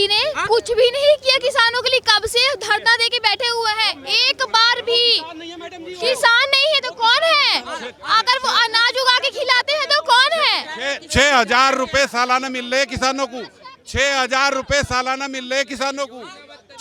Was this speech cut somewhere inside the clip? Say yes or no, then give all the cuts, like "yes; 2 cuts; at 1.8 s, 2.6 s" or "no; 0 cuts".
no; 0 cuts